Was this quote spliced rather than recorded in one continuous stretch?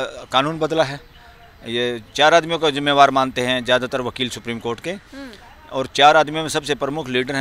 no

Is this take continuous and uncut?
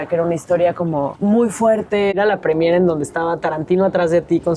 no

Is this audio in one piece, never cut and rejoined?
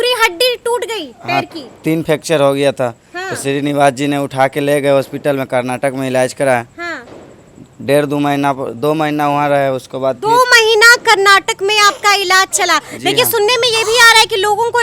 yes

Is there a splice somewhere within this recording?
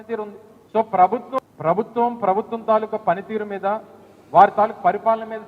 yes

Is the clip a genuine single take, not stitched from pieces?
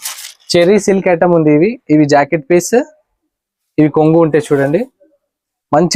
yes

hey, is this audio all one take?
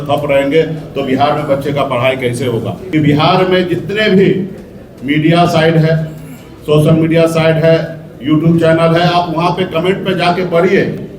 no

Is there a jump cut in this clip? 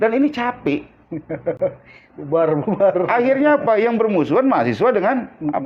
no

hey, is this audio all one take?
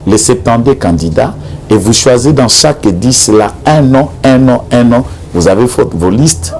yes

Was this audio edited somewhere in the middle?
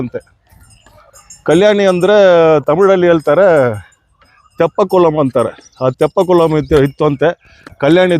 no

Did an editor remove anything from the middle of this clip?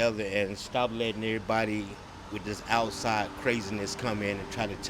no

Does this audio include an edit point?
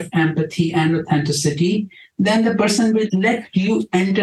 yes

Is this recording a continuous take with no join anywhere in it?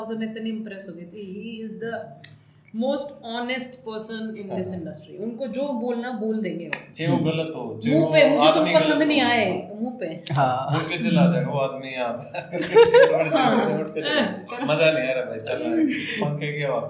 yes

